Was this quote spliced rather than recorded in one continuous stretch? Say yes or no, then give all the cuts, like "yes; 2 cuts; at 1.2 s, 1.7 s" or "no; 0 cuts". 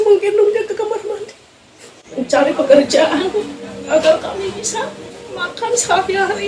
yes; 1 cut; at 2.0 s